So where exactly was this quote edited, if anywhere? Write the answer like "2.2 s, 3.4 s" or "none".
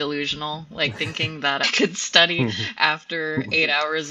1.6 s